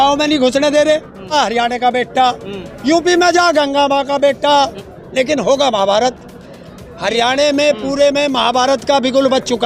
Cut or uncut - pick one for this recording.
cut